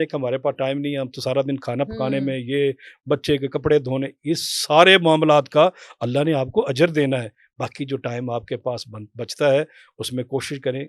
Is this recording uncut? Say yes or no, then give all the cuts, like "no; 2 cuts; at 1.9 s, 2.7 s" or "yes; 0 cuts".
yes; 0 cuts